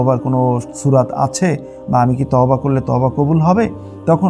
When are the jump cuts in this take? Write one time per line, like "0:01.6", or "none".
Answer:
none